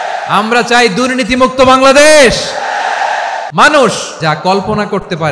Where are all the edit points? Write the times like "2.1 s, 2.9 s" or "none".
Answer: 3.4 s, 4.1 s